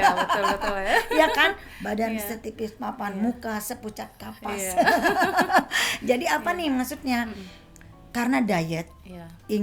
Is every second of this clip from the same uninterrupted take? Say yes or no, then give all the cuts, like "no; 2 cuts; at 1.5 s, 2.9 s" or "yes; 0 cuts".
yes; 0 cuts